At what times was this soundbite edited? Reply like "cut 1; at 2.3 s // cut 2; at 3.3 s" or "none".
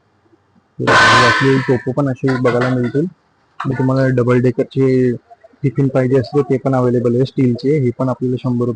cut 1; at 3.7 s